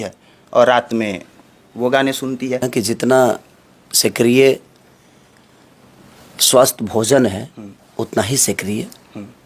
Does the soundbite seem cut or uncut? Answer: cut